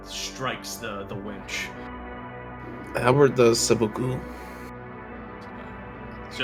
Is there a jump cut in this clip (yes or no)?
no